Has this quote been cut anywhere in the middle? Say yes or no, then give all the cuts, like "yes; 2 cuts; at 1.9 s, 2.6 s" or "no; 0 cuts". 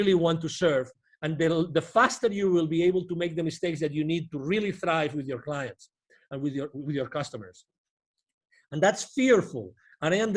no; 0 cuts